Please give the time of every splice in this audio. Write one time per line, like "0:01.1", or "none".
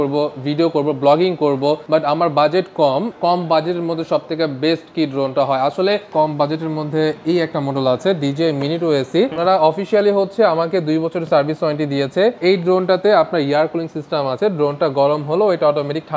0:01.8
0:03.1
0:06.1
0:09.4
0:12.4